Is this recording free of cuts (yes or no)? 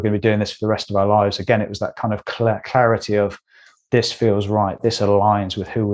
yes